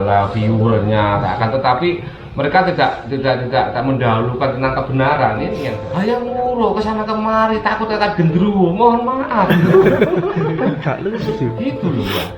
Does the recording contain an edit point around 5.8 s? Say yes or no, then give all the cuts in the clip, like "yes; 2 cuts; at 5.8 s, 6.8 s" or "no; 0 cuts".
yes; 1 cut; at 5.8 s